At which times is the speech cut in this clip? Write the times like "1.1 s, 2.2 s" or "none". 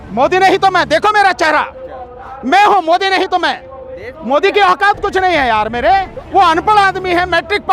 none